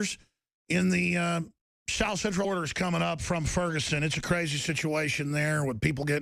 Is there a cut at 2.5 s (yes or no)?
no